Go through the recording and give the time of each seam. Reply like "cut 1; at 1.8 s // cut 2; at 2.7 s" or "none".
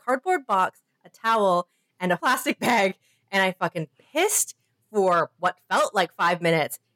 cut 1; at 2.2 s